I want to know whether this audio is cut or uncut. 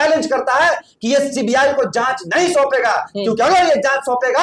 uncut